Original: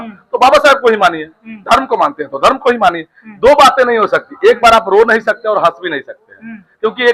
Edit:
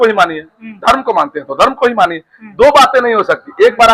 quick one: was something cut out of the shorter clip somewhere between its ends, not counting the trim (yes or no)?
no